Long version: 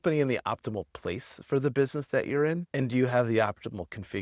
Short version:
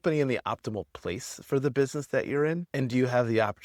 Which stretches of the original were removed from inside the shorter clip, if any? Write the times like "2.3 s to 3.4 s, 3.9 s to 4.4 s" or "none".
none